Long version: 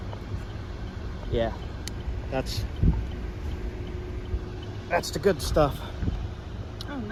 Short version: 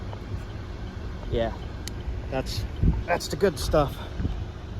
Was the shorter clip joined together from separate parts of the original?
yes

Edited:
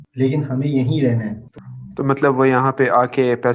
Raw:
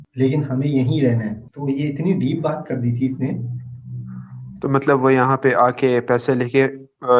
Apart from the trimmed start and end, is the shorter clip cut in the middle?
yes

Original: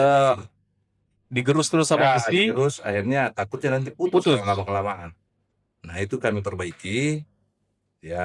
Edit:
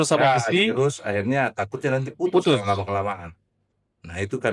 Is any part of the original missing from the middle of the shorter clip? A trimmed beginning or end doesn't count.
no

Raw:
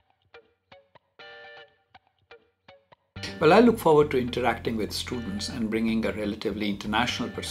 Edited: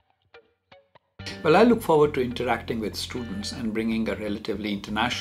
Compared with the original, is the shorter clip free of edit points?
no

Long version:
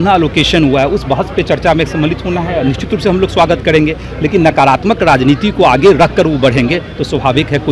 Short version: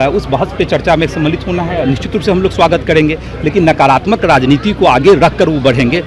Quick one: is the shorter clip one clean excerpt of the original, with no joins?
yes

